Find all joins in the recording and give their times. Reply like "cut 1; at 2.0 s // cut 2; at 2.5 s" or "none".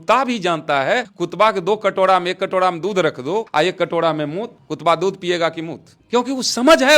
cut 1; at 1.2 s // cut 2; at 3.5 s